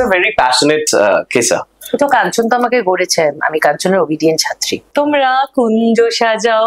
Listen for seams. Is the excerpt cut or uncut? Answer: cut